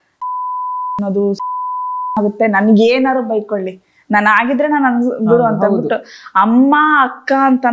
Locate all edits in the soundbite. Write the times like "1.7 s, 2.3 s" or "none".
none